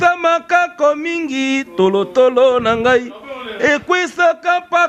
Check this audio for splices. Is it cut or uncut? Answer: uncut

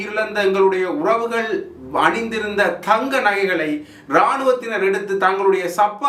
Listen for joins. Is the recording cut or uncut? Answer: uncut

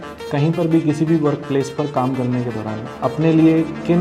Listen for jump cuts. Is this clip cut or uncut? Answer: cut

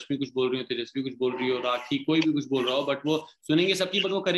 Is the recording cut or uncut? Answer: uncut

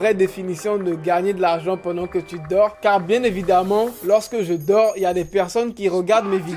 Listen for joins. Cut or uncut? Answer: uncut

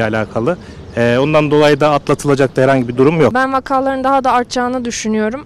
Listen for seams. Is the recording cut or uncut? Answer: cut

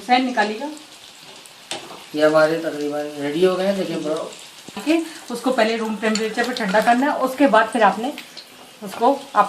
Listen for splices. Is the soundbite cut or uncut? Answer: cut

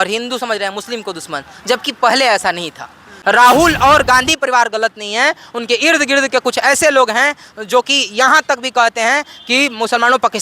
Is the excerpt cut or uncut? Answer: cut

